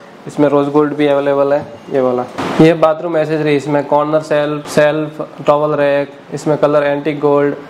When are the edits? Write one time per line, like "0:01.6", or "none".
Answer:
0:02.4
0:04.6